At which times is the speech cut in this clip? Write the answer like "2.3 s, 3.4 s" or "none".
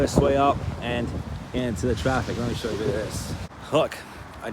3.6 s